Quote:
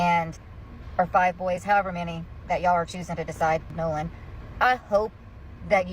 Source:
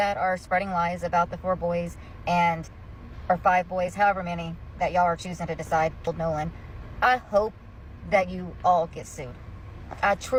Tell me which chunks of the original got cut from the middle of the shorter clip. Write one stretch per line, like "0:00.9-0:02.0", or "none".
0:06.0-0:06.1